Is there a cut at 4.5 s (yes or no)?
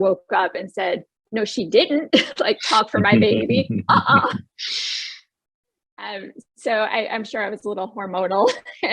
no